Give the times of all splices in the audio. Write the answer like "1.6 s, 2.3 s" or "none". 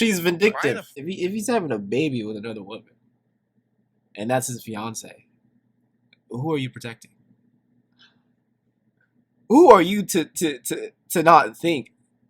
1.0 s